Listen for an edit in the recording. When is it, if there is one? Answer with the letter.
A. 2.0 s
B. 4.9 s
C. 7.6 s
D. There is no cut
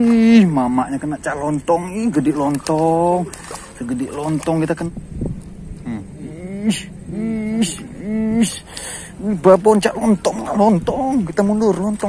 B